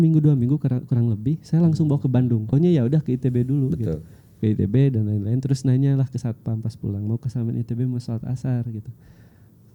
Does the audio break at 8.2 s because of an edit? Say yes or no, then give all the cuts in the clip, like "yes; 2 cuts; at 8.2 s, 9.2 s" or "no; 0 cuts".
no; 1 cut; at 2.5 s